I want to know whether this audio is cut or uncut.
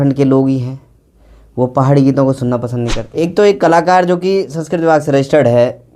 cut